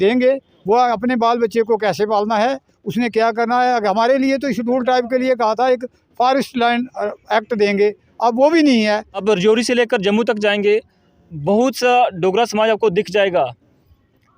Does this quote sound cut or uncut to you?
cut